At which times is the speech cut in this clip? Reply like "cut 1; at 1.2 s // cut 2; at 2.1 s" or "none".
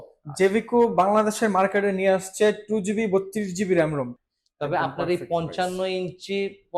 cut 1; at 4.1 s